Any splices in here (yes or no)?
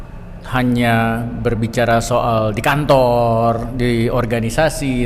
no